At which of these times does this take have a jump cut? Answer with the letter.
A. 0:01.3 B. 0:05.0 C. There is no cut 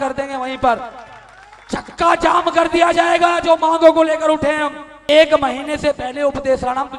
B